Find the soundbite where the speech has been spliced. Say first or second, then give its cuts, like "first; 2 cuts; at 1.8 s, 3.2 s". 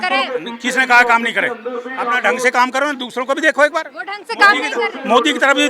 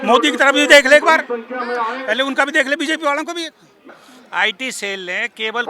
second; 1 cut; at 3.9 s